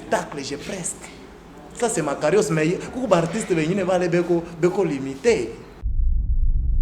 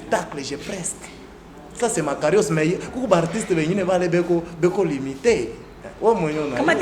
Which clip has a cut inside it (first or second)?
first